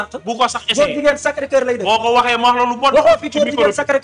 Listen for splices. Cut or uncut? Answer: uncut